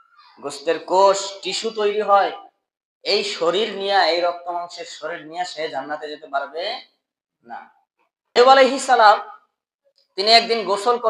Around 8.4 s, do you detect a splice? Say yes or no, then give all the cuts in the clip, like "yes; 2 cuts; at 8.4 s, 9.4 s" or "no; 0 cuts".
yes; 1 cut; at 8.4 s